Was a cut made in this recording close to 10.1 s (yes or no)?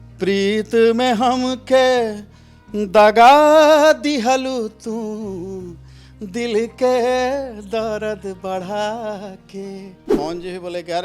yes